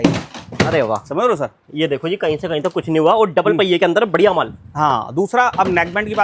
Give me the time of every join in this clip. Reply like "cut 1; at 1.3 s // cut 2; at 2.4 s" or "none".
none